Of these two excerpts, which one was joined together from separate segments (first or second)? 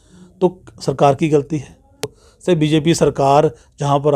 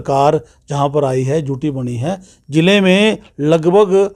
first